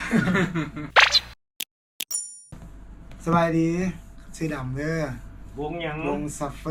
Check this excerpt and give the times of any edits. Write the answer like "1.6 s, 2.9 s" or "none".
none

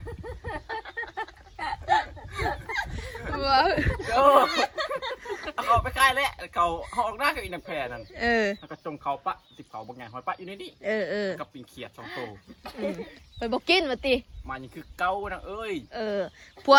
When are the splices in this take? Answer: none

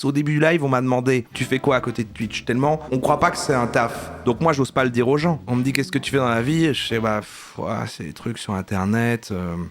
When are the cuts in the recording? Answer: 1.3 s, 2.8 s, 4.1 s

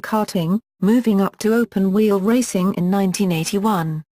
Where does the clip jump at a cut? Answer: none

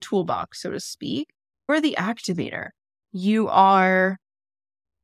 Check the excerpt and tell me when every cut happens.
1.7 s

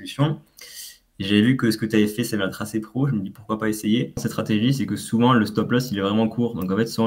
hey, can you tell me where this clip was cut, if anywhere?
4.3 s

